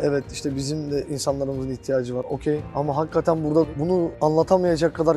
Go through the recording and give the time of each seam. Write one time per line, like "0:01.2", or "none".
0:01.1
0:02.5
0:04.0

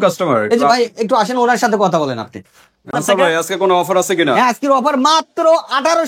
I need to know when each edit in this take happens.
0:03.0

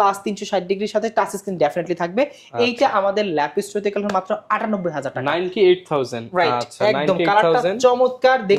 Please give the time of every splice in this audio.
none

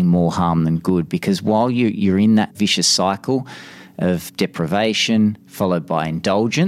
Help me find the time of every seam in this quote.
0:02.5
0:04.3

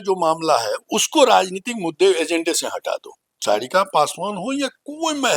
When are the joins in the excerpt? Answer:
0:03.3

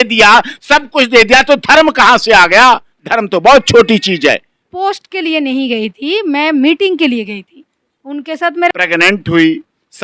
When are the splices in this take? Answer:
0:04.6
0:08.7

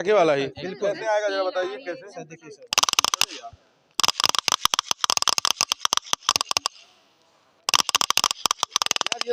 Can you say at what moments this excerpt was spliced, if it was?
none

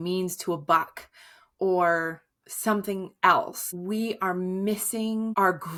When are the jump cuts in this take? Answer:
none

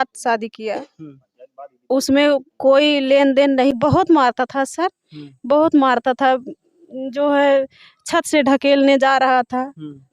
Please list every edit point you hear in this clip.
0:03.7

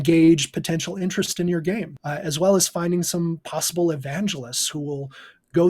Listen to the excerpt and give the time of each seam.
0:02.0

